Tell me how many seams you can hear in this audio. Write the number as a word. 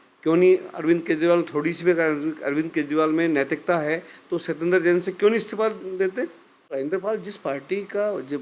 one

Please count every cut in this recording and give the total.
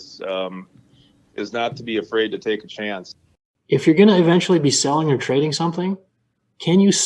one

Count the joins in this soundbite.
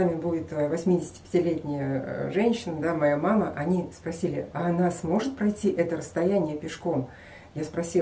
zero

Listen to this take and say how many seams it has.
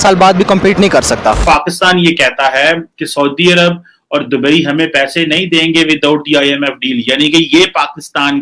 one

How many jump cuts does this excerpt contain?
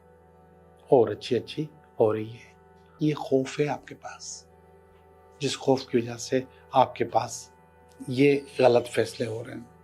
one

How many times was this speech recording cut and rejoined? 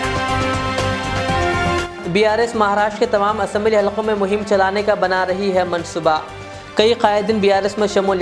zero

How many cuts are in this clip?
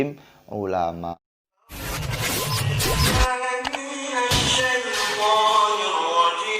one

